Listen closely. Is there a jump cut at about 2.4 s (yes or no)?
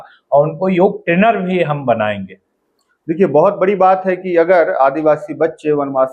no